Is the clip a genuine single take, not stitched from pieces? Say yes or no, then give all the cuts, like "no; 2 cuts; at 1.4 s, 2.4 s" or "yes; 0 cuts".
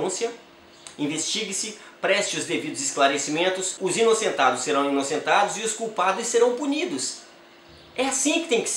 no; 1 cut; at 3.7 s